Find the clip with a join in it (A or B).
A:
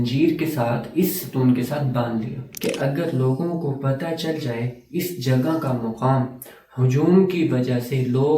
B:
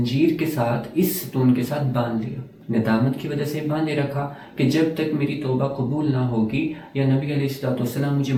A